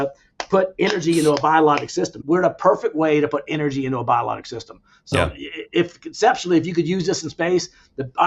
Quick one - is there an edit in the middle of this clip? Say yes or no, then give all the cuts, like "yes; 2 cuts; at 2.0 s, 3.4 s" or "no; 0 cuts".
yes; 1 cut; at 2.1 s